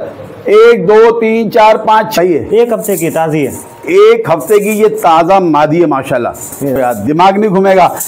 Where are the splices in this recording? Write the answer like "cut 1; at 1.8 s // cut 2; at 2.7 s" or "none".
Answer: cut 1; at 2.1 s // cut 2; at 6.8 s